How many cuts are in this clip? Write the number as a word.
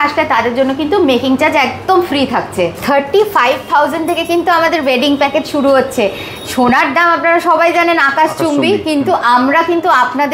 one